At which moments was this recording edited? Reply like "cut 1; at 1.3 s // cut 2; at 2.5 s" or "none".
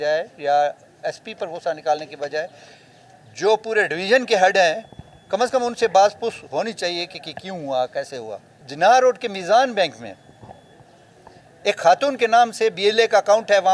cut 1; at 8.6 s